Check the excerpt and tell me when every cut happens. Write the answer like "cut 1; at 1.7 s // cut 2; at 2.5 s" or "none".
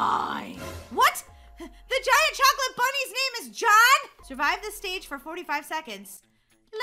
cut 1; at 4.2 s